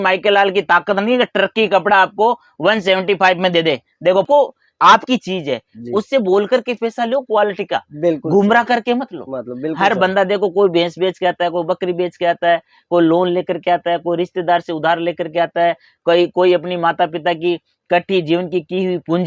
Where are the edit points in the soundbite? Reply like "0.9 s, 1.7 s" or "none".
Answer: 4.3 s